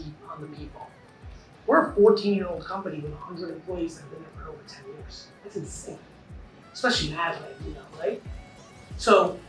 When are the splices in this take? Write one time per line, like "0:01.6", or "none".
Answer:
none